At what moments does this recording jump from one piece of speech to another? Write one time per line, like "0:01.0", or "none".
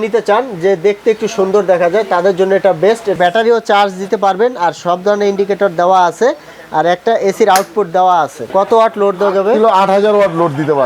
0:03.1
0:08.4